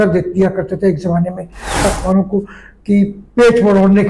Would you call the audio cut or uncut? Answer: cut